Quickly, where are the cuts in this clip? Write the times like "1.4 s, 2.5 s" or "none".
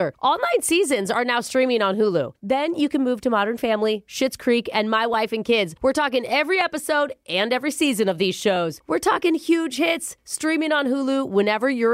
none